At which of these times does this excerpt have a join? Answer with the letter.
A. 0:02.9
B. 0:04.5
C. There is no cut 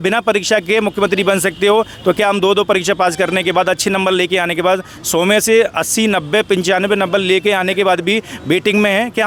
C